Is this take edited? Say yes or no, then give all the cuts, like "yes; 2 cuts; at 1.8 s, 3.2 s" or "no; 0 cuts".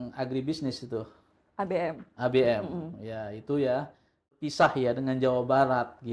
yes; 1 cut; at 4.4 s